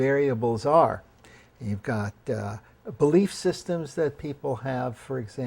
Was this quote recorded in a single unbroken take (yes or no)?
no